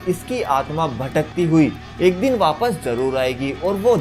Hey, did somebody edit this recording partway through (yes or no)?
no